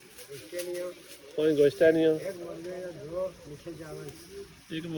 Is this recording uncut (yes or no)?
yes